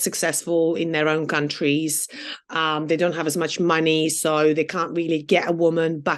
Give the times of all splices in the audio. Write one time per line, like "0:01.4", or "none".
none